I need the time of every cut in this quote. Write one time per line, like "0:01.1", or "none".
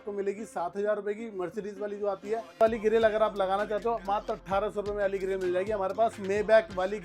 0:02.6

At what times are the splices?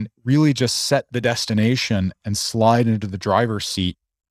none

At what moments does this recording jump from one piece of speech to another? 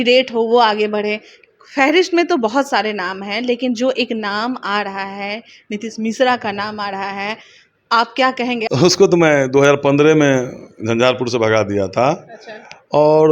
0:08.7

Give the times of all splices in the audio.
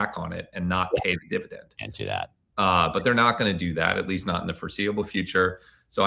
none

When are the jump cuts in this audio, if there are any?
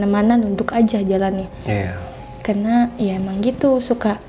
none

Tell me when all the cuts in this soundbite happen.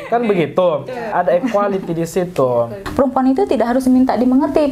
0:01.1
0:02.8

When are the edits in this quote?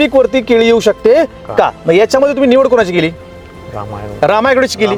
none

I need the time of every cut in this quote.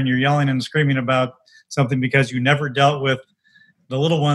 none

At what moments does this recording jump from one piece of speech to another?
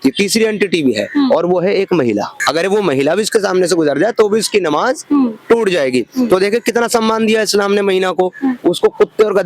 0:02.4

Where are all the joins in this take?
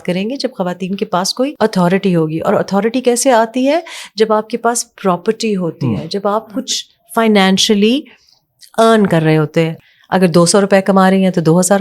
0:01.5
0:09.8

